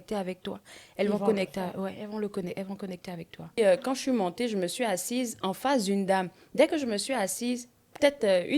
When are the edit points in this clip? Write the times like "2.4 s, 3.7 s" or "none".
3.6 s